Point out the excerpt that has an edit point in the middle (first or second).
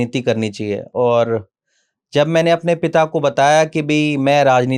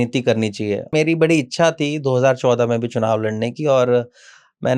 second